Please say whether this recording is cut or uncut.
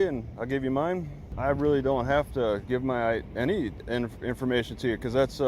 cut